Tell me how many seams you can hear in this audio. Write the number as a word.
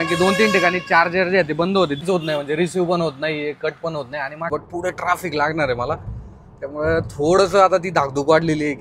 two